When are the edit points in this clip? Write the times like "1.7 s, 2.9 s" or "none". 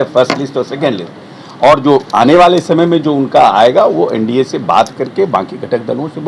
none